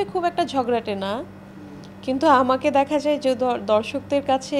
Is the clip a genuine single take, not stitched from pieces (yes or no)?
yes